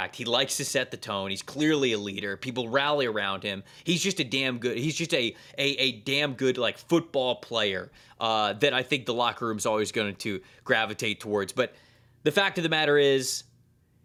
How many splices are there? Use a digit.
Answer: 0